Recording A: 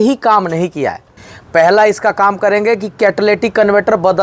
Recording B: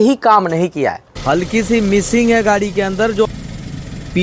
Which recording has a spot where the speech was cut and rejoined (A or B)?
B